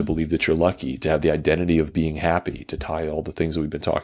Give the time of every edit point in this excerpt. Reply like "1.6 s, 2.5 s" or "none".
none